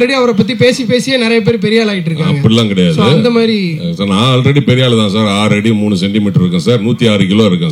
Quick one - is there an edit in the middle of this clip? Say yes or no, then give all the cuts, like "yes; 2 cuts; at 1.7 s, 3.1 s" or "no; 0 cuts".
no; 0 cuts